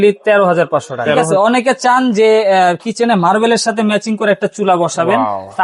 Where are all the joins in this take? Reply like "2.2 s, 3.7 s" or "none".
1.2 s

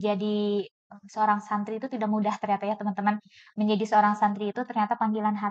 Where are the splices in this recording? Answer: none

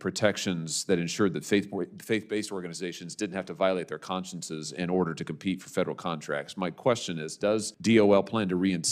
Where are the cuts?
7.7 s

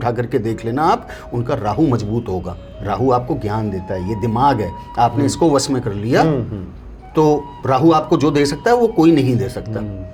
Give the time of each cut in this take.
none

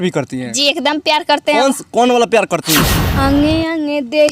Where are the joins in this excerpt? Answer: 3.0 s

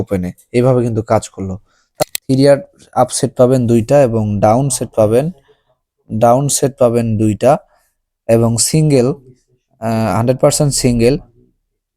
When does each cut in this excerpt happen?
1.8 s

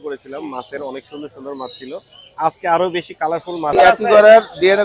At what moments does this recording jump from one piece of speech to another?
3.8 s

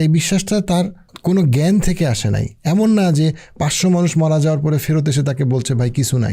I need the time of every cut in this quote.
1.0 s

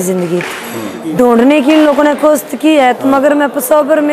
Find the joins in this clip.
0.9 s

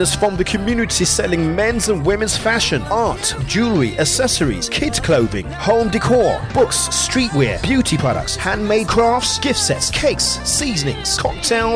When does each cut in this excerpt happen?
none

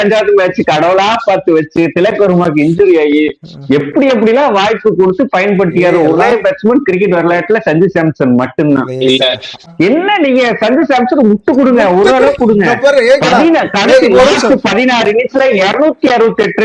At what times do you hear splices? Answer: 9.6 s

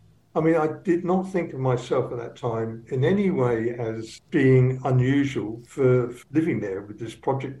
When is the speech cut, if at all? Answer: 4.2 s

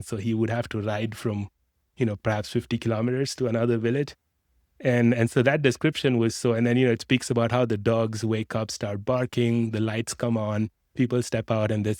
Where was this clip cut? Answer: none

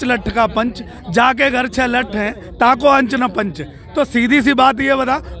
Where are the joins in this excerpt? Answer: none

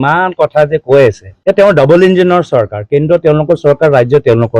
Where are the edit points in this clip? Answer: 1.3 s

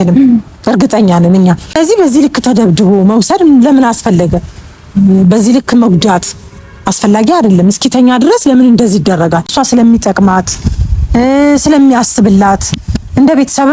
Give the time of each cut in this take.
1.8 s, 9.6 s

